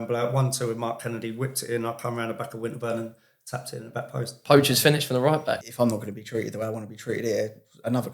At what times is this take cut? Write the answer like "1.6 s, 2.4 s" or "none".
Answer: 4.4 s, 5.7 s